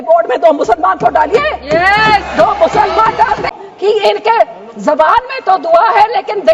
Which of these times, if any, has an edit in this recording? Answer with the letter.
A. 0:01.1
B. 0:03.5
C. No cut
B